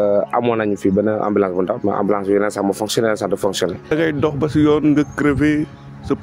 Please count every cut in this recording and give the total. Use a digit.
1